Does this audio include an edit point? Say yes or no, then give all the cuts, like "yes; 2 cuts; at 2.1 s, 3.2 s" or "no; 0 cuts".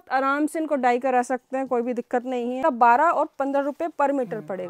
yes; 1 cut; at 2.6 s